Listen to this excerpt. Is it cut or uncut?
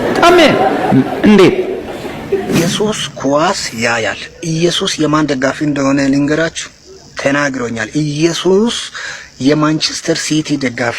cut